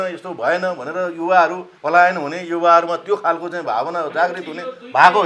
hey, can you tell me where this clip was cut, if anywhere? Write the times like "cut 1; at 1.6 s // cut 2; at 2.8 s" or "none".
cut 1; at 1.7 s